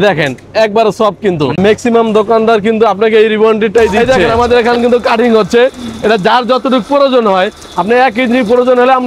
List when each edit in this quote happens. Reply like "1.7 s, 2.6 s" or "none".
1.6 s, 4.1 s